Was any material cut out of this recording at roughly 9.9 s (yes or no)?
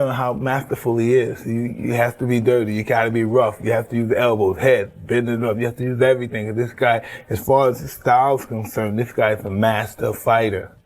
yes